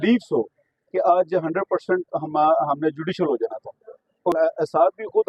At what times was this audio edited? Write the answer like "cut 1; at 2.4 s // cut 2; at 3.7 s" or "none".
cut 1; at 4.3 s